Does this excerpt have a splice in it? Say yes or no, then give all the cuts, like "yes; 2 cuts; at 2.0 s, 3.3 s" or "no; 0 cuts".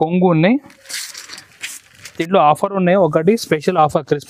yes; 1 cut; at 2.1 s